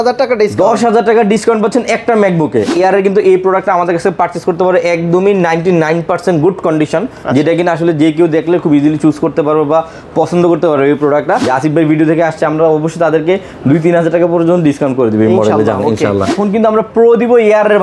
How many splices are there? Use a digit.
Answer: 3